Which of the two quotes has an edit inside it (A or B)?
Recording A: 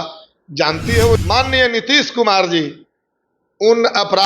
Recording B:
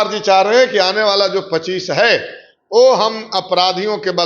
A